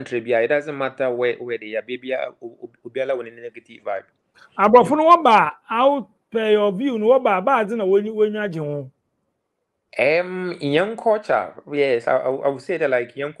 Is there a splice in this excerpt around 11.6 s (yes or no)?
no